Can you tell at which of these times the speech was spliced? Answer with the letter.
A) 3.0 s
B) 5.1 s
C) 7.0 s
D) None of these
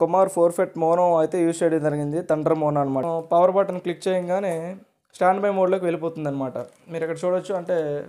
A